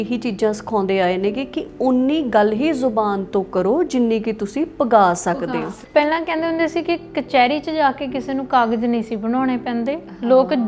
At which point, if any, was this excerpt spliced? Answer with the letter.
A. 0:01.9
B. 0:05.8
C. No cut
B